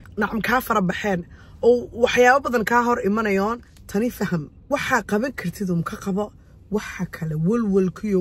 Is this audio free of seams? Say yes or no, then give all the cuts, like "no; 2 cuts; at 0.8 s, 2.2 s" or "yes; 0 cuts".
yes; 0 cuts